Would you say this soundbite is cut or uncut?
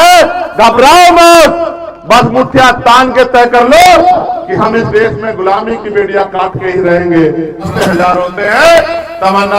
cut